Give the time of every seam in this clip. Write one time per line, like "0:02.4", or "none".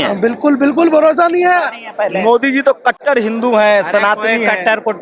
0:01.8